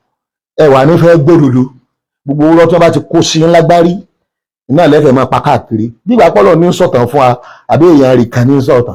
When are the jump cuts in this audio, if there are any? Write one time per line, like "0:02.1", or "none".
none